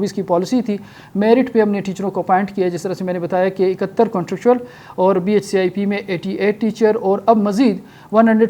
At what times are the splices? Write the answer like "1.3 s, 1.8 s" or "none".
none